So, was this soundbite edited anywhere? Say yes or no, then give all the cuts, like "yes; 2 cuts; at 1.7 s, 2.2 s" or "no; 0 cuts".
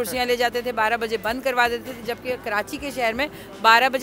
no; 0 cuts